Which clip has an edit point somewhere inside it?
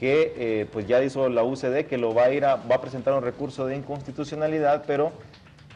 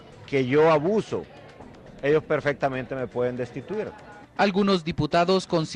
first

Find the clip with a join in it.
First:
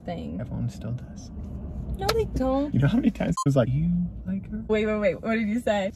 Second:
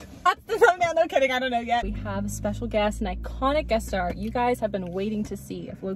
second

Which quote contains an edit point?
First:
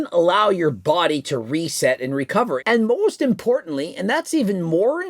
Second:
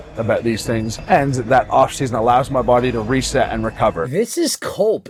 first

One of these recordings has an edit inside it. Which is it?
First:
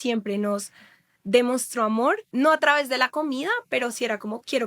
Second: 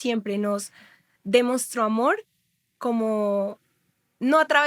first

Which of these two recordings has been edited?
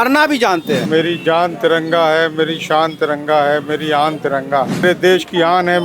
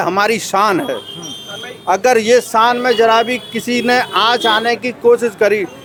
first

